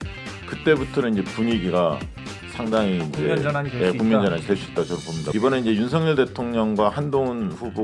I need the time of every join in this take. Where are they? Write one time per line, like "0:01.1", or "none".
0:05.2